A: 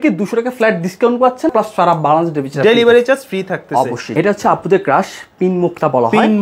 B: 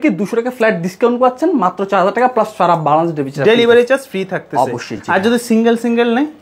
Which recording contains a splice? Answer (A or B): A